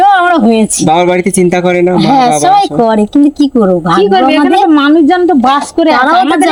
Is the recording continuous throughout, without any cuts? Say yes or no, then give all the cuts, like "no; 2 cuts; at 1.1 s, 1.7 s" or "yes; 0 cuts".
yes; 0 cuts